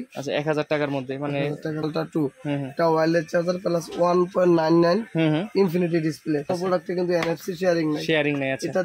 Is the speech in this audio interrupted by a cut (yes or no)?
yes